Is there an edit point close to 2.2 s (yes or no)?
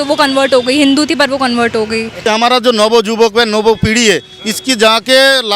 yes